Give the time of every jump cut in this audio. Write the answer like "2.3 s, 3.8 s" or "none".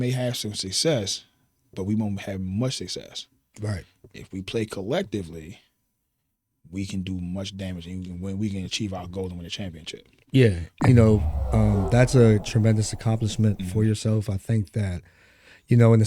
10.8 s